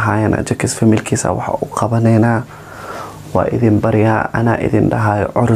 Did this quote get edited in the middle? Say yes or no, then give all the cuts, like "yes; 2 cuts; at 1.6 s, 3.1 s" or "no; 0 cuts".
no; 0 cuts